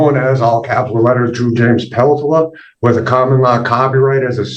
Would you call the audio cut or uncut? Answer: uncut